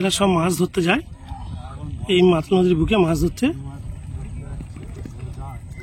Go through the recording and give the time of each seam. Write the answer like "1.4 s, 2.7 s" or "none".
none